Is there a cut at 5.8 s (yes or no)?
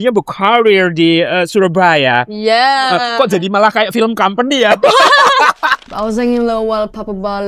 yes